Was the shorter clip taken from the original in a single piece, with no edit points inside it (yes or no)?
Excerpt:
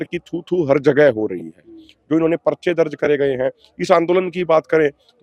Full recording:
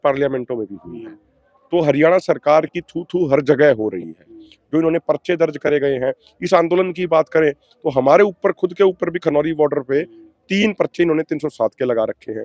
yes